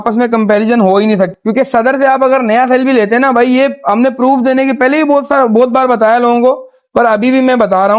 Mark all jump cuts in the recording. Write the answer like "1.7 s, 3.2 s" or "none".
1.3 s